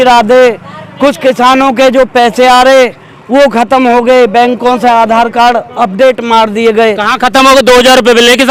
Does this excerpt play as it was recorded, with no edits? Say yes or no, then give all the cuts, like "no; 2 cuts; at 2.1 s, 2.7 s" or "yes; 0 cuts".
yes; 0 cuts